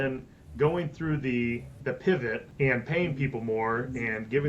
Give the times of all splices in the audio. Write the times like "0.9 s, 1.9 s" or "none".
1.7 s, 2.5 s

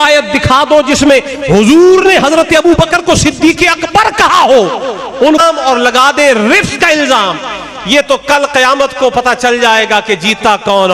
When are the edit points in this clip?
5.4 s

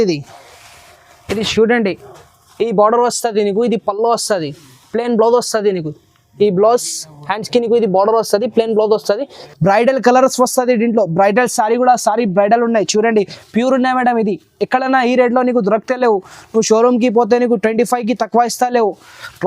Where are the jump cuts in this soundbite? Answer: 9.4 s

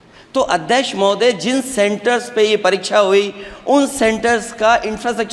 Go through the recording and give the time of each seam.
none

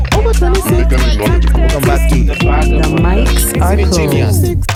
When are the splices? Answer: none

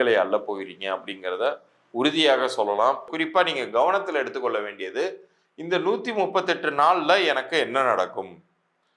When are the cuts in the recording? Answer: 3.2 s

